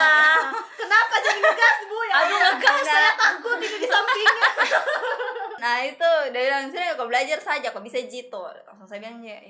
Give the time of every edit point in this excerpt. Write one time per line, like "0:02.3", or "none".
0:05.6